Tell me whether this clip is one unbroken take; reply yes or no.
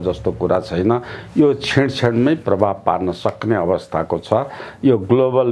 yes